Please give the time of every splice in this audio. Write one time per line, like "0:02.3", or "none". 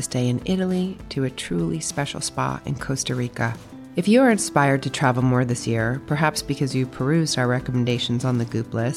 none